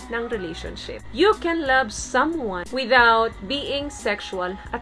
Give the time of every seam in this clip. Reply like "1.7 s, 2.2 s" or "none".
1.0 s, 2.7 s